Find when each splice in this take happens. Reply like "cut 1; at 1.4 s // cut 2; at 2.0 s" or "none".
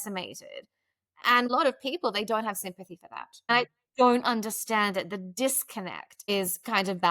cut 1; at 1.5 s // cut 2; at 3.5 s // cut 3; at 6.1 s